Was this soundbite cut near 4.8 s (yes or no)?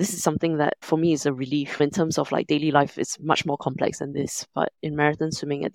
yes